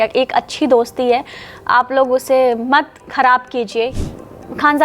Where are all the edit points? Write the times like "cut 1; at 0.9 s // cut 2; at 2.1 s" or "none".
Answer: cut 1; at 3.9 s